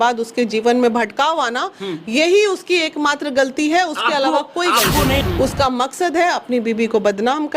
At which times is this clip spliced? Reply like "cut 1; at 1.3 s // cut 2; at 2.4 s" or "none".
cut 1; at 5.2 s